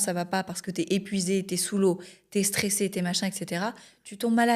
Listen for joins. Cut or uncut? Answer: uncut